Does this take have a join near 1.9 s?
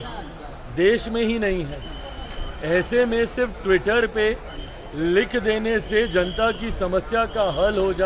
no; 0 cuts

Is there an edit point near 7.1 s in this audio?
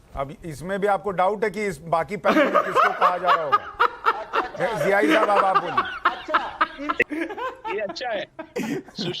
yes; 1 cut; at 7.1 s

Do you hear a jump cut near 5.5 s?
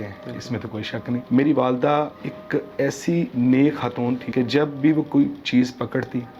no; 4 cuts; at 1.2 s, 2.1 s, 3.3 s, 4.3 s

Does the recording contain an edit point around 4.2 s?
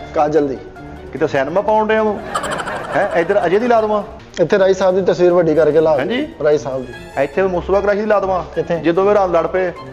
yes; 1 cut; at 4.2 s

